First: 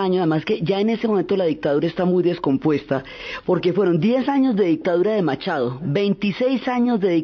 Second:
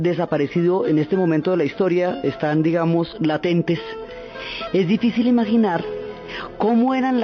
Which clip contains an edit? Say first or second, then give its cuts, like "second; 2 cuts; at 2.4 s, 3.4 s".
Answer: second; 1 cut; at 5.7 s